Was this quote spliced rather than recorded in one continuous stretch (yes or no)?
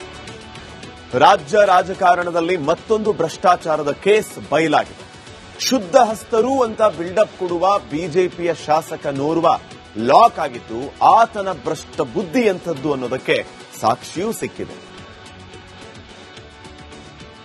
yes